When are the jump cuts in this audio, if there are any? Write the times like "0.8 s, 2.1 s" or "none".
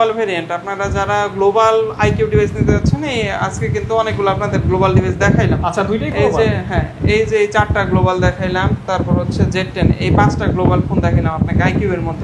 none